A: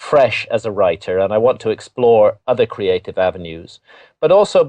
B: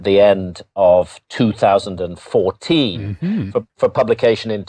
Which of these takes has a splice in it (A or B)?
B